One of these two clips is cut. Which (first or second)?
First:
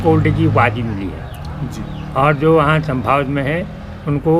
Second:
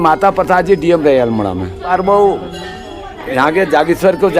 second